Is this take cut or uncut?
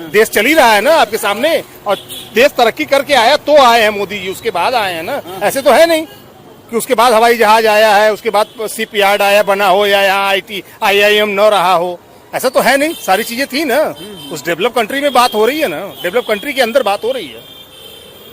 uncut